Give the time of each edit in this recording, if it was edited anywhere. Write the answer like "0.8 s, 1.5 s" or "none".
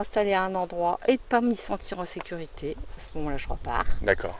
none